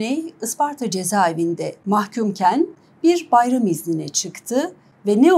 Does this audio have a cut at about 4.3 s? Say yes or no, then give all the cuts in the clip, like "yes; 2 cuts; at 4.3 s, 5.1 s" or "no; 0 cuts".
no; 1 cut; at 1.7 s